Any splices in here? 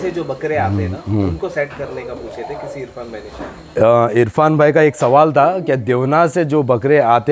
no; 0 cuts

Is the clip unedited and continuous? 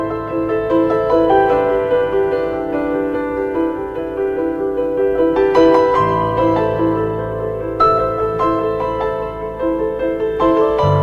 yes; 0 cuts

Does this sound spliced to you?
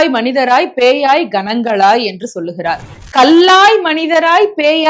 yes; 1 cut; at 2.9 s

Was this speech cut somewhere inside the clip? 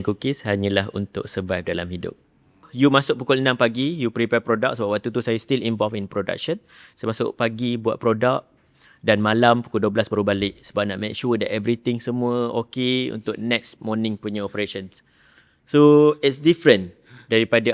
yes; 1 cut; at 2.7 s

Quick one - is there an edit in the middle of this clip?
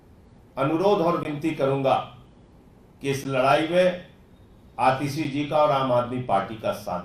no; 0 cuts

